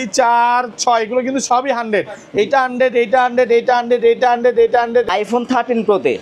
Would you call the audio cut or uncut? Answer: cut